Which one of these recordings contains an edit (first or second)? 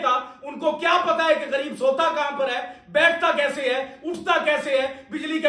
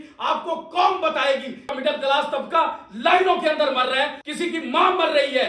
second